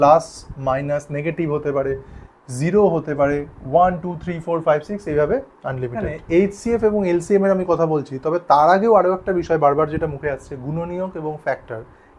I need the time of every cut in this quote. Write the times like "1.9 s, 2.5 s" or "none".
6.2 s

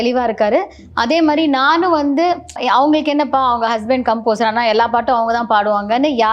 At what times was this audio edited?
2.6 s

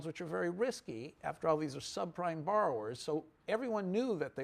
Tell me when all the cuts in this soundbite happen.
1.8 s

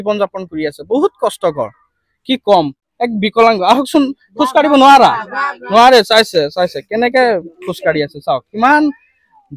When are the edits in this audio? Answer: 2.8 s

